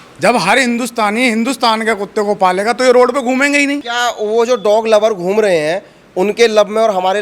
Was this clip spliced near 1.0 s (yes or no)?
no